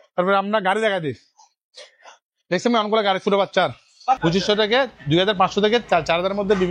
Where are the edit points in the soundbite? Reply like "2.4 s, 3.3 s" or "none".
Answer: 4.2 s